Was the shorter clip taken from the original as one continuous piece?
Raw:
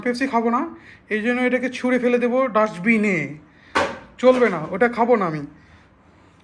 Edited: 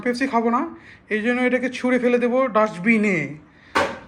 yes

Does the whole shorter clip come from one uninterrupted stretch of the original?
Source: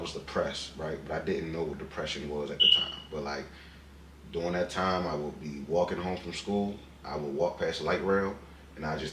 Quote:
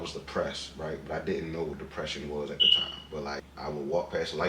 no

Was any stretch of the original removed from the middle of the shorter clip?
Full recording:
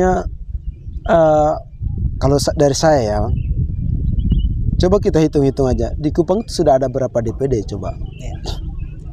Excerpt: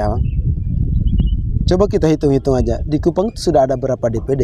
no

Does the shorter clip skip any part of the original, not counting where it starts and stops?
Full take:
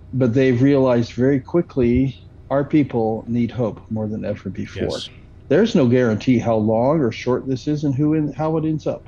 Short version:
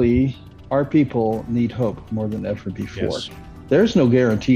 no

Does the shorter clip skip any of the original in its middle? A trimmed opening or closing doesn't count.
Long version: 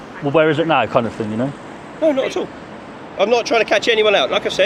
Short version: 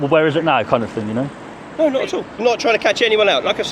yes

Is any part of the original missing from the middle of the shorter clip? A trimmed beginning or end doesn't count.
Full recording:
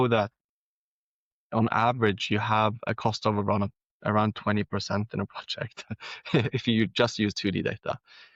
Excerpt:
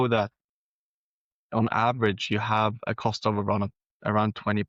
no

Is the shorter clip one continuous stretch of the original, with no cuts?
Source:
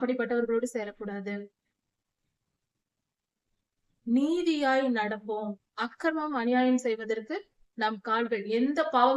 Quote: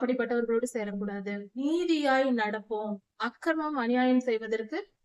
no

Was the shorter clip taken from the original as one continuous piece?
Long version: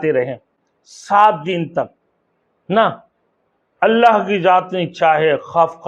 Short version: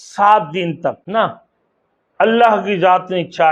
no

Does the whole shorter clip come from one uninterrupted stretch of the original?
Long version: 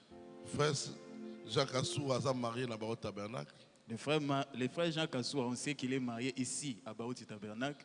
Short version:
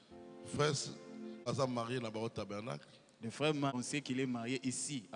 no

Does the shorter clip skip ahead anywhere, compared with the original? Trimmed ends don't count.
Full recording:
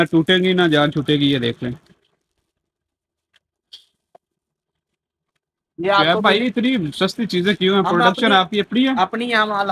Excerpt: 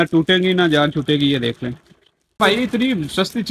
yes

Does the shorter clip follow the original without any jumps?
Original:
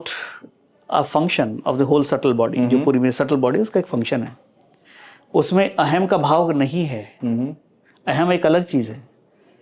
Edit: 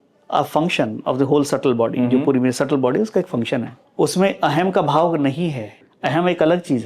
no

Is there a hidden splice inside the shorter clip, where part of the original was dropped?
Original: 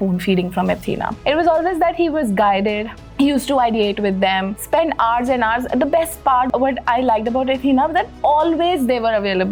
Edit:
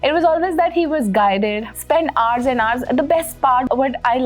yes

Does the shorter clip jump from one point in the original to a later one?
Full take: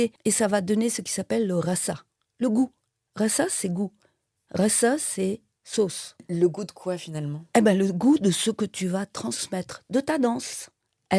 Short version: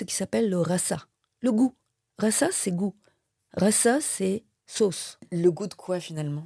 no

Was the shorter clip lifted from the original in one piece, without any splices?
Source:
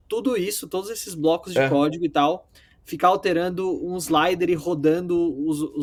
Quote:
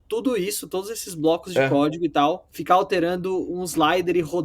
no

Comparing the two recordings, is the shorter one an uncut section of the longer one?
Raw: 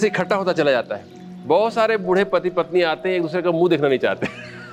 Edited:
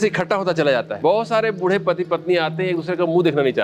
no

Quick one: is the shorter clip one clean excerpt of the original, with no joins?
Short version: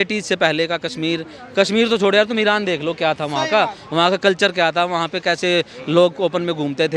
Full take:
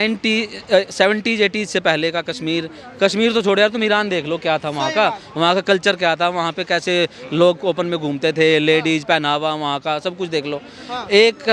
yes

